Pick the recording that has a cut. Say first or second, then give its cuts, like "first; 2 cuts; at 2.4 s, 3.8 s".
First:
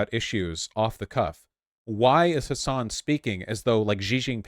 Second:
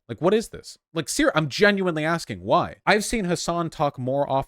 second; 1 cut; at 2.7 s